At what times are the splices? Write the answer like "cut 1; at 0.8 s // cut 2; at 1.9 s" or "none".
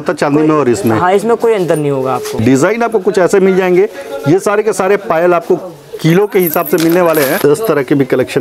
cut 1; at 2.4 s // cut 2; at 7.4 s